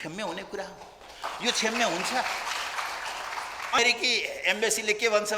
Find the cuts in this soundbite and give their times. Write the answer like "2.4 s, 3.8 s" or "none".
3.8 s

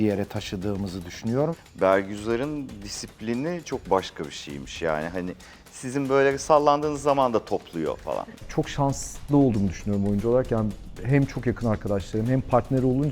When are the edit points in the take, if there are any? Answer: 1.5 s, 8.3 s

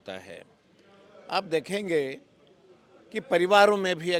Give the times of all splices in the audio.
none

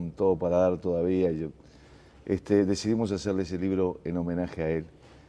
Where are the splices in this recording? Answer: 3.9 s

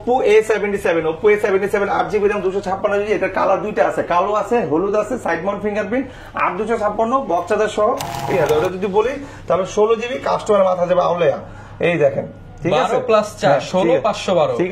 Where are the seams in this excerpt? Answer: 8.3 s

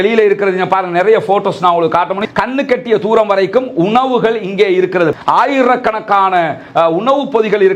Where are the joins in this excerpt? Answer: 2.2 s, 5.1 s

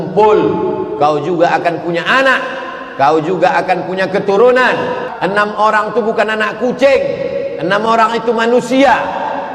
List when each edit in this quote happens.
5.1 s

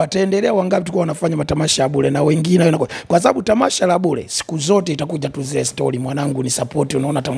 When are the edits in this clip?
none

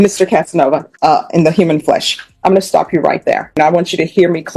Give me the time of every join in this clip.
0.9 s, 3.6 s

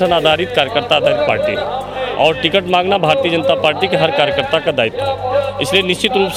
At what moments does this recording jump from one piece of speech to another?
none

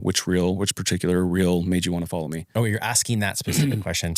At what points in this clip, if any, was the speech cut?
2.4 s

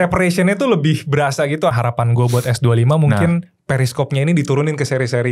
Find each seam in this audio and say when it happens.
1.7 s

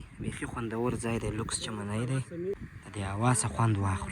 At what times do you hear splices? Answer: none

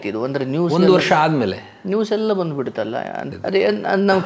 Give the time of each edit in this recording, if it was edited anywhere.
3.2 s

